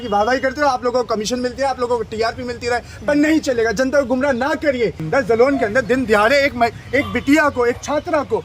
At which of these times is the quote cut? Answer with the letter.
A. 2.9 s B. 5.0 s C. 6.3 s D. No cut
B